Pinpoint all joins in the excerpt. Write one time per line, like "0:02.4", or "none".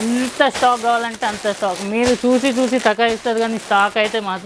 none